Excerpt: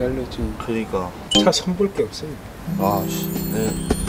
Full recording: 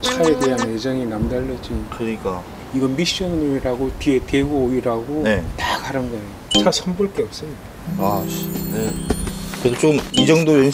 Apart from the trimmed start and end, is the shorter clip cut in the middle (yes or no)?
yes